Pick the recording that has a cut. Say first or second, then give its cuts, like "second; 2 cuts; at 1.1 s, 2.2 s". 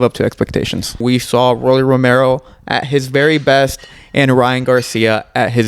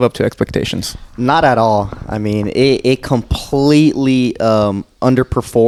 first; 1 cut; at 1.0 s